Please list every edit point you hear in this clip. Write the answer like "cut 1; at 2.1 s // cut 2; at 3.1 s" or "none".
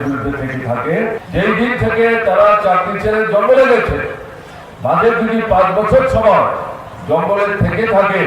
cut 1; at 1.2 s